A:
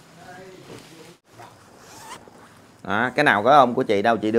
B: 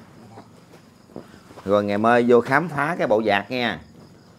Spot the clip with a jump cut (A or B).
A